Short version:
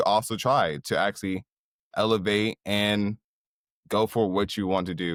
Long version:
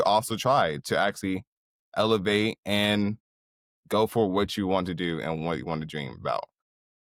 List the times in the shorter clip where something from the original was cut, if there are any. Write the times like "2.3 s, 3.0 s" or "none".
none